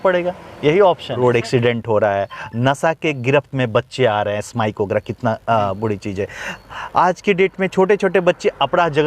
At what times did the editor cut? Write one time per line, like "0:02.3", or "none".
0:01.2